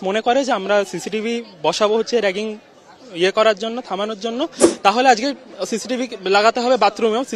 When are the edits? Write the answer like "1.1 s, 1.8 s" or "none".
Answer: none